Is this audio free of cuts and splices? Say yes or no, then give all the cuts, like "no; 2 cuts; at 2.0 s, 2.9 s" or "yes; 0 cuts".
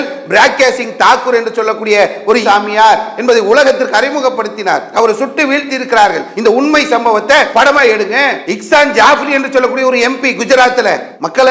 yes; 0 cuts